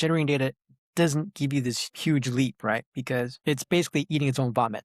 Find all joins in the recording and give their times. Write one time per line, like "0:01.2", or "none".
0:01.9
0:03.3